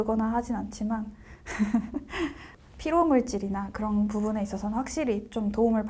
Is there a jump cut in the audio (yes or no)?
yes